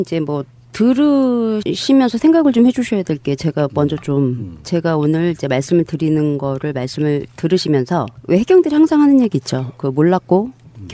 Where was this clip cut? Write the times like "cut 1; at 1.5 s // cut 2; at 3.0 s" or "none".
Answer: none